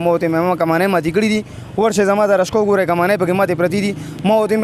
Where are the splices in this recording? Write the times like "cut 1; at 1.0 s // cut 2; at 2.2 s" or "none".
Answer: none